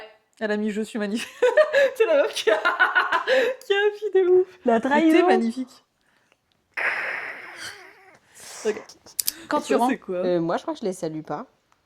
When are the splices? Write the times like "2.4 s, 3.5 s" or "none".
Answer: 9.9 s